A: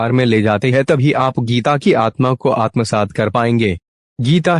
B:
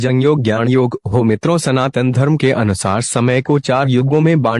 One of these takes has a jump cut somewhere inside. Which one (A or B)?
B